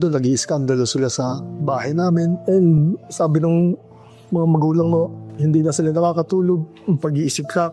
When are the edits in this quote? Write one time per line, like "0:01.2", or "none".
0:05.2